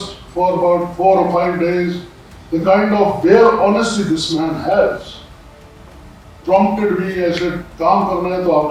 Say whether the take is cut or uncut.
uncut